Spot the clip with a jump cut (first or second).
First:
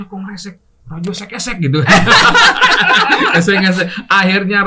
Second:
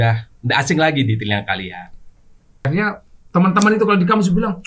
second